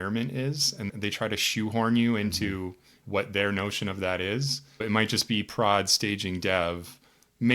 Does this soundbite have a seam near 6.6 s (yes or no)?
no